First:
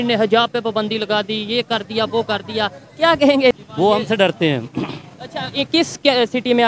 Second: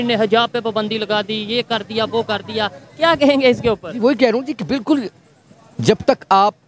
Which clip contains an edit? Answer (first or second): first